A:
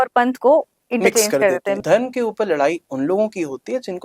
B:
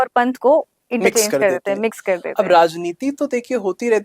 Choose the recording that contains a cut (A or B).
A